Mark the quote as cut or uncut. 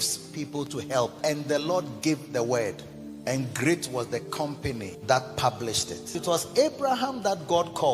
cut